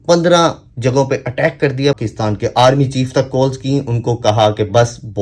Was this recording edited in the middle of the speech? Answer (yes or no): yes